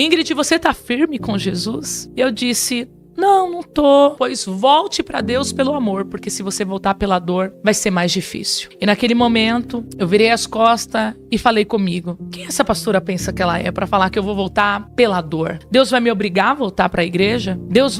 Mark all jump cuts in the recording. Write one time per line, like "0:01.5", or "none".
none